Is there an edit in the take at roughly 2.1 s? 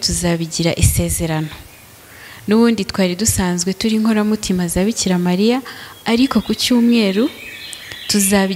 no; 0 cuts

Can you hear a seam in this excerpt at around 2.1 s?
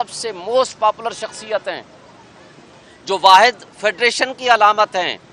no; 0 cuts

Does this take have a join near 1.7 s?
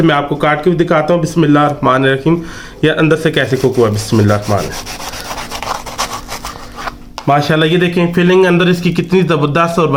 no; 0 cuts

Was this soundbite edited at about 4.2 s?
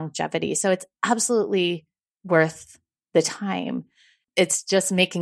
yes; 1 cut; at 4.2 s

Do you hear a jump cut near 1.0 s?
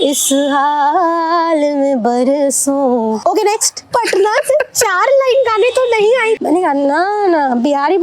no; 2 cuts; at 3.6 s, 6.4 s

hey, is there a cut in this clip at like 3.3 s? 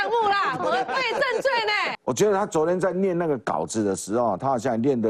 no; 1 cut; at 1.9 s

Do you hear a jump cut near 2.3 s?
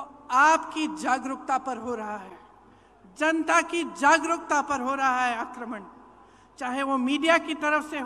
no; 0 cuts

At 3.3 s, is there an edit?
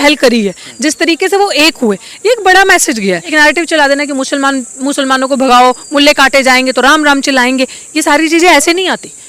yes; 1 cut; at 3.3 s

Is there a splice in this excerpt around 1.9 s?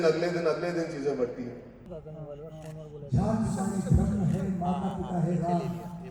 yes; 1 cut; at 1.9 s

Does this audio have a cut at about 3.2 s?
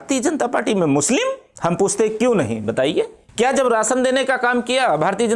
yes; 2 cuts; at 1.5 s, 3.2 s

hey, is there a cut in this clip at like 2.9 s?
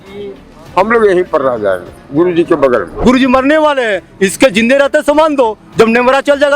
yes; 1 cut; at 2.9 s

